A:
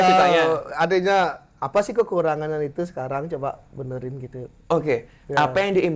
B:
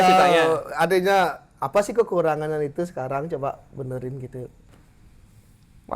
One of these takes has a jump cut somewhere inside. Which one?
B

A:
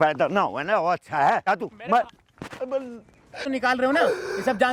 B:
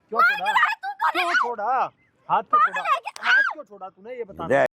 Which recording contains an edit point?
A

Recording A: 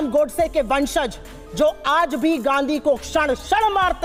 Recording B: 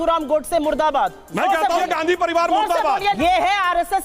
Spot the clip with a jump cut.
B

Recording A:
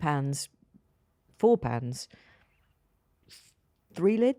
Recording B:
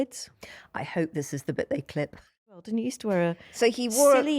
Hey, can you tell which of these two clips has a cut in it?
B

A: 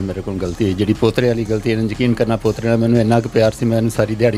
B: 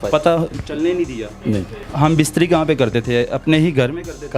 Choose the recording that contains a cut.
B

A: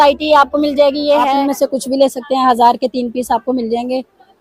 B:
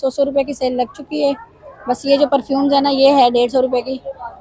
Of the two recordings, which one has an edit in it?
A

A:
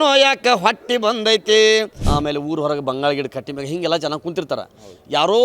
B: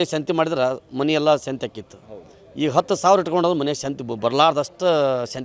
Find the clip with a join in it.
A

